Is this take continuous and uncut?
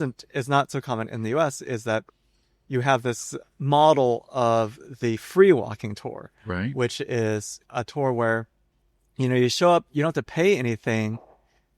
no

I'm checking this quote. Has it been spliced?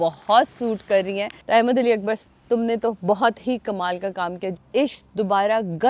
yes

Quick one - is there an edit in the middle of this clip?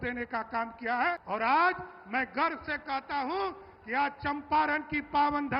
yes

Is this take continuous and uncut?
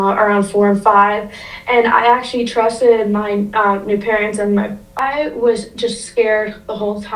no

